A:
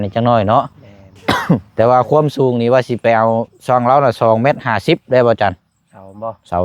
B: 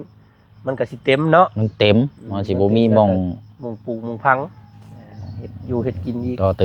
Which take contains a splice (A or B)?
A